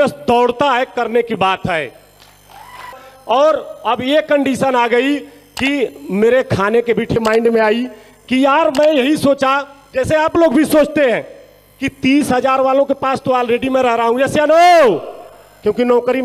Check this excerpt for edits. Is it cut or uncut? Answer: cut